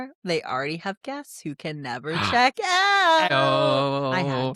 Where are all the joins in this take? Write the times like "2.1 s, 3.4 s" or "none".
3.3 s